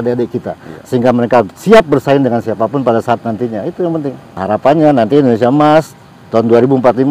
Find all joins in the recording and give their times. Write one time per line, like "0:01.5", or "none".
0:04.3